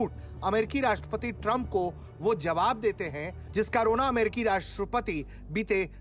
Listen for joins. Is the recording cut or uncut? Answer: uncut